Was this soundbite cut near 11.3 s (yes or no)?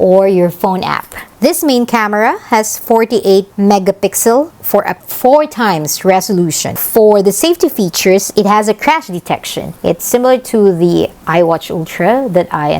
no